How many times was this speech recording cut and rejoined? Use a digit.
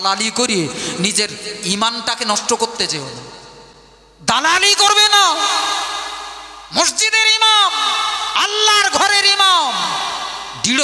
0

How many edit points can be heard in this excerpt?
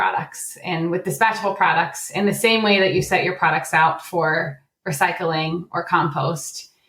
0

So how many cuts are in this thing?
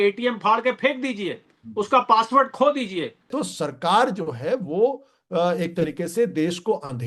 1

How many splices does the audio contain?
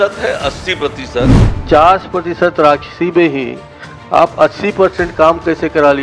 1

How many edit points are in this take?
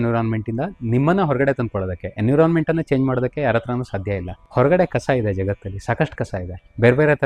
0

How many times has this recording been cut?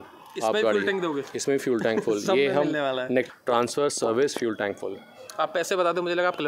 1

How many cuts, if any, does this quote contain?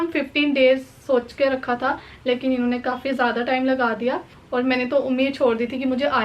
1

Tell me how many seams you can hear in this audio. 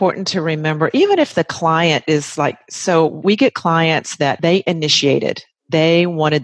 2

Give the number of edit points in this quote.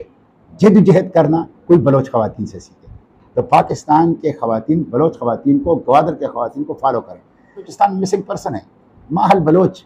1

